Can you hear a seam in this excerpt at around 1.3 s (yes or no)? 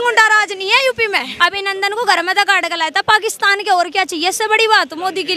yes